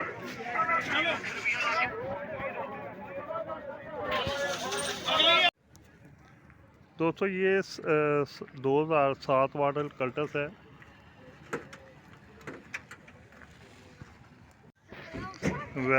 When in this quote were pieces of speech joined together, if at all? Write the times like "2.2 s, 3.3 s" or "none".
14.8 s